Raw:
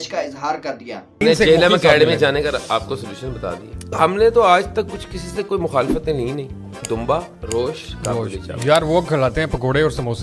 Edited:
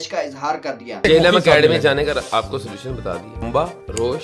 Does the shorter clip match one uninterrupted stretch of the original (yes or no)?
no